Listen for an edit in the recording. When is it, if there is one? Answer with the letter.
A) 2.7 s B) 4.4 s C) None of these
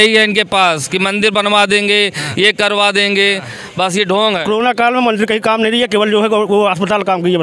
B